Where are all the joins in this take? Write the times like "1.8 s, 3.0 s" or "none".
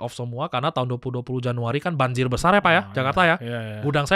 none